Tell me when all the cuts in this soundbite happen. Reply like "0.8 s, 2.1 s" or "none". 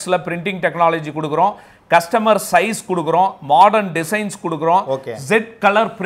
none